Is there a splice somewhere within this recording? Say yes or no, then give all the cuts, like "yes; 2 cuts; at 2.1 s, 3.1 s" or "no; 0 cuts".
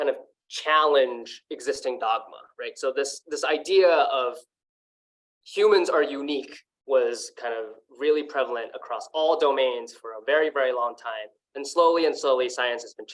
no; 0 cuts